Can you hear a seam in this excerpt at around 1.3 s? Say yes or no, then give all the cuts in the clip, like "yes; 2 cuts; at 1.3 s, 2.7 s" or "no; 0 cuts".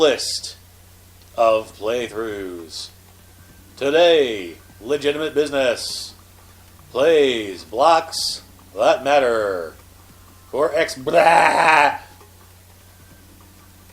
no; 1 cut; at 8.1 s